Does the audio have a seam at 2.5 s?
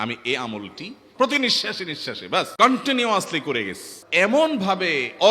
yes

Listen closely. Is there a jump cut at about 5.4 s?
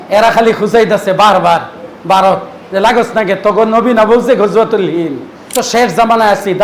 yes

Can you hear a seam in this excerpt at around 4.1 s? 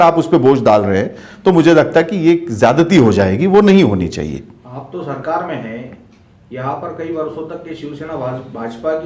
no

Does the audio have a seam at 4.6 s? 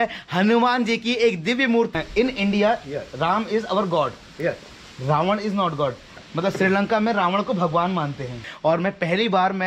no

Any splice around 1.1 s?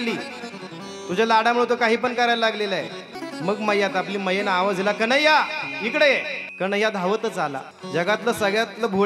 no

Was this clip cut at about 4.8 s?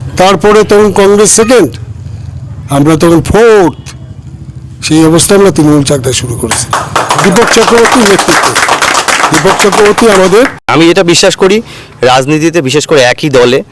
no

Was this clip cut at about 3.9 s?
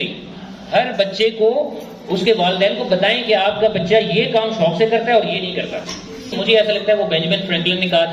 no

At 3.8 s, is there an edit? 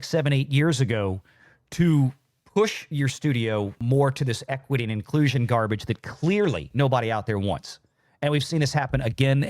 yes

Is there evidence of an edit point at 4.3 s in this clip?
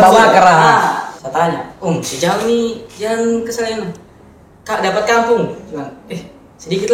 no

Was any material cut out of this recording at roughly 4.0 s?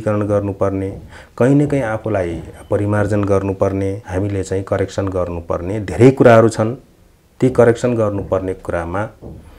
yes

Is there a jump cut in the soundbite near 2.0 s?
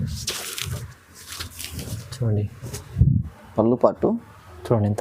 yes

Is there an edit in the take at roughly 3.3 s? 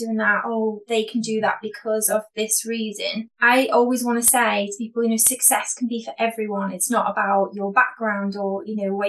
yes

